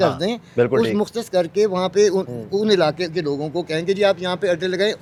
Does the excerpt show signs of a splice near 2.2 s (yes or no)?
no